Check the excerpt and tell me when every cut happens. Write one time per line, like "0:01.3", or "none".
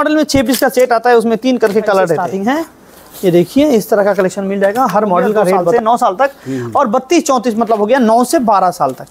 0:02.3
0:05.7